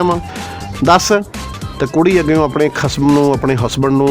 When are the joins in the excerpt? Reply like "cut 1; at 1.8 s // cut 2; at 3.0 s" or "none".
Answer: cut 1; at 1.4 s